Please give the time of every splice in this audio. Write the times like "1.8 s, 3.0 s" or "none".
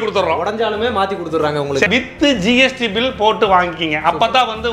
1.9 s